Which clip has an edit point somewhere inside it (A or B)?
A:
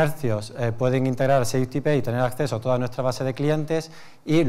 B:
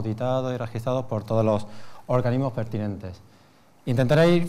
B